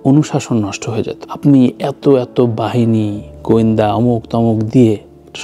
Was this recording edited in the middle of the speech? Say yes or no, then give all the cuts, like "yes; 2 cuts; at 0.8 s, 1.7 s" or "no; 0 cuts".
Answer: no; 0 cuts